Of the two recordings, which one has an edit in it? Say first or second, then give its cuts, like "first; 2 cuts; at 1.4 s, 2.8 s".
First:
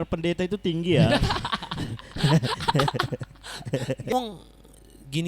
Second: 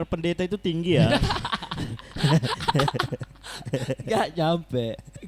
first; 1 cut; at 4.1 s